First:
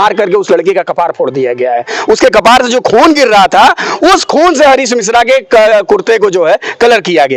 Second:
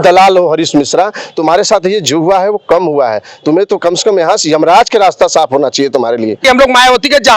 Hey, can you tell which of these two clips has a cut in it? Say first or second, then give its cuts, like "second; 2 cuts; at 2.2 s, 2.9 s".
second; 1 cut; at 6.4 s